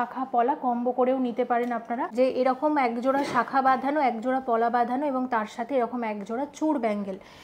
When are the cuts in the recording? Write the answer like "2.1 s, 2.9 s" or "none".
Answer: 2.1 s